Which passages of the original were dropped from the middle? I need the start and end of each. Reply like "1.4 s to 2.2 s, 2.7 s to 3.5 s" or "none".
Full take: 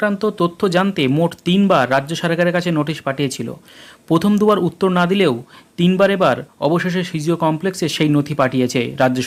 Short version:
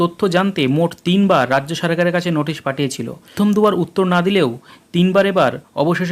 3.8 s to 4.2 s